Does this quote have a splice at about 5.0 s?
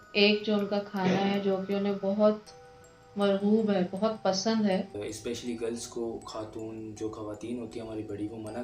yes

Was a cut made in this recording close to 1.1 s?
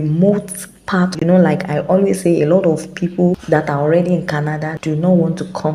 yes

